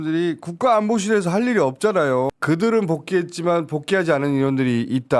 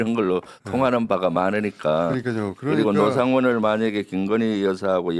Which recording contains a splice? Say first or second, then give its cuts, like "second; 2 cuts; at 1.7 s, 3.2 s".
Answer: first; 1 cut; at 2.3 s